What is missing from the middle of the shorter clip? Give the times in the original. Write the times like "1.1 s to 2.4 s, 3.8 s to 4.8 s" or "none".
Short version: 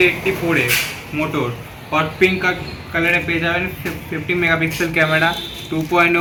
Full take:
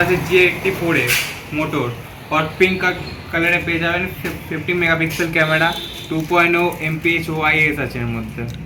none

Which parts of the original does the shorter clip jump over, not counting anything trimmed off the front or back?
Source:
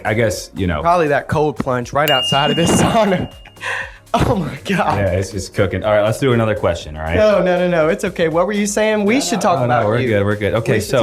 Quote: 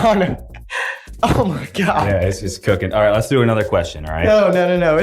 none

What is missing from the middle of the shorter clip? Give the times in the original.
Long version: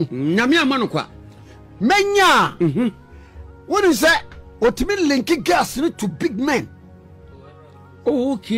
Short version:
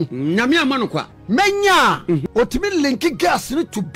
1.1 s to 1.6 s, 2.7 s to 4.5 s

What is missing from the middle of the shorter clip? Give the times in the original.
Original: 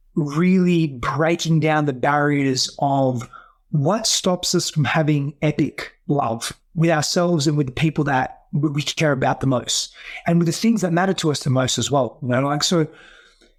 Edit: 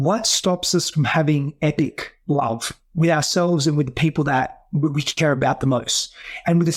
none

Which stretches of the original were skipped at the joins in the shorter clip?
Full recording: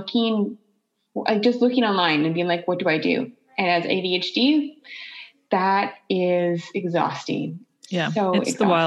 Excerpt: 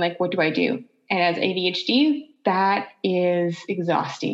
4.8 s to 5.4 s

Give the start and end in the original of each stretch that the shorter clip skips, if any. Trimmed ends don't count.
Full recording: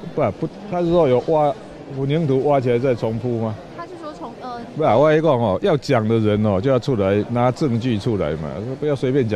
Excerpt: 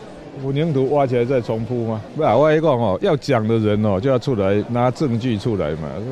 3.6 s to 4.7 s

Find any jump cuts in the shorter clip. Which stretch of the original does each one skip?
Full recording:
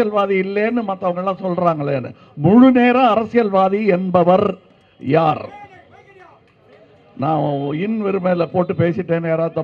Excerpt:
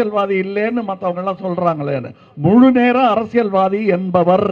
none

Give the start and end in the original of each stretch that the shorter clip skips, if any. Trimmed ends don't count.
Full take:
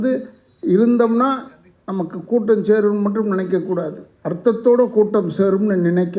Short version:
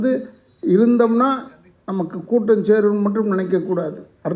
none

